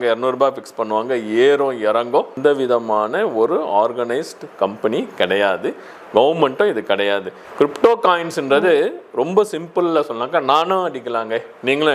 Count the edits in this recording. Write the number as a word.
two